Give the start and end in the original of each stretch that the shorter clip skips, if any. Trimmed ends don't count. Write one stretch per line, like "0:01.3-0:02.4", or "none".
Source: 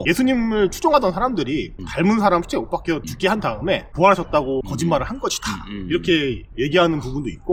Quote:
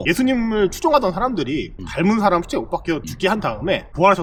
none

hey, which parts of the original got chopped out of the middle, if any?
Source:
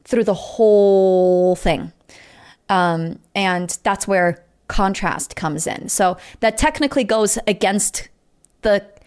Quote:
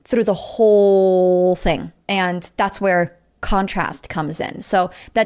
0:02.0-0:03.2

